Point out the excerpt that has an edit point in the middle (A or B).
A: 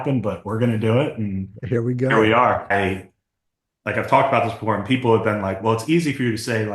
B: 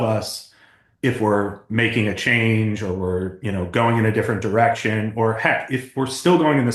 A